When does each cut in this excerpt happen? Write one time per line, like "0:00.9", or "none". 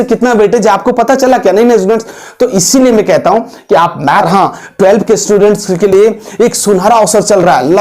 0:04.3